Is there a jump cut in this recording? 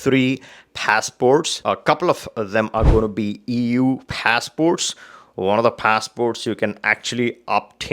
yes; 1 cut; at 1.5 s

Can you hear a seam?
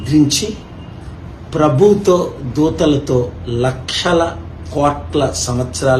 no; 0 cuts

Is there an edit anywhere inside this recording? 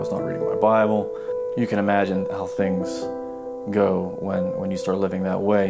yes; 1 cut; at 2.9 s

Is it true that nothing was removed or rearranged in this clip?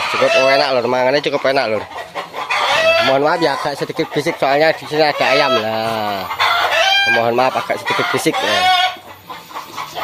yes; 0 cuts

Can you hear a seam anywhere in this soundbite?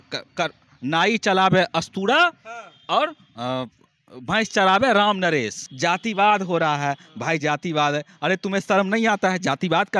yes; 1 cut; at 5.6 s

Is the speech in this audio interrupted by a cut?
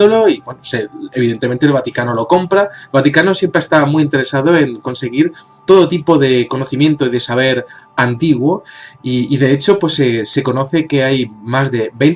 yes; 1 cut; at 6.5 s

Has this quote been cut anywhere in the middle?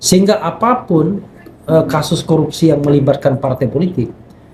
no; 0 cuts

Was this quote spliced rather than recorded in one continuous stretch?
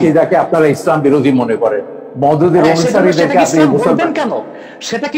no; 0 cuts

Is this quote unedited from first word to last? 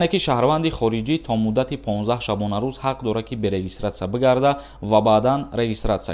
yes; 0 cuts

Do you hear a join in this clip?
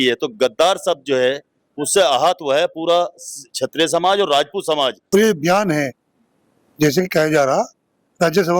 yes; 1 cut; at 5.0 s

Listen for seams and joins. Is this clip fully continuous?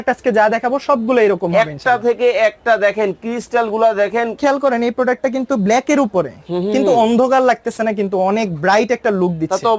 no; 1 cut; at 4.4 s

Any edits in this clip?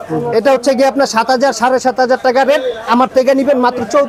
no; 0 cuts

